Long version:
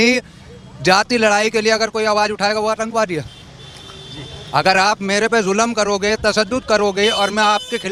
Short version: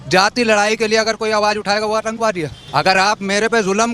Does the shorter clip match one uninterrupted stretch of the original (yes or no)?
no